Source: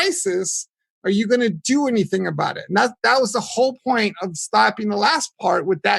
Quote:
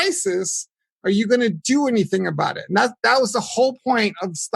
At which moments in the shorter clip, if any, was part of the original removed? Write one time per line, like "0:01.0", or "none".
none